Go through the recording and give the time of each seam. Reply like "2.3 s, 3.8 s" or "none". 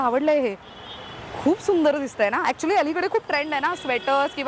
none